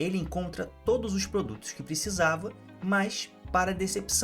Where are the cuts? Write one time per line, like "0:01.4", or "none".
none